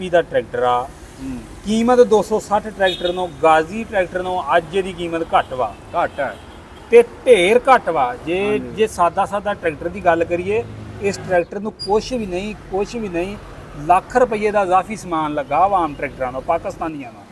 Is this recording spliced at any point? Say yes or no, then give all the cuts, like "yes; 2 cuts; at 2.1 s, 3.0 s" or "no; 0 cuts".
no; 0 cuts